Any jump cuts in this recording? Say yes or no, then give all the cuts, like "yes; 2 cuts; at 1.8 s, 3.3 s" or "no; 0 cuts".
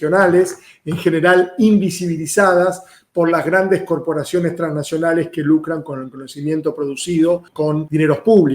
yes; 1 cut; at 7.6 s